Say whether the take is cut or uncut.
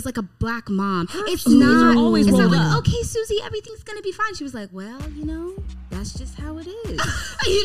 uncut